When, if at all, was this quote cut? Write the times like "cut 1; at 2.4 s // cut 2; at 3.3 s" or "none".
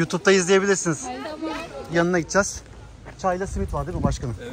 cut 1; at 1.7 s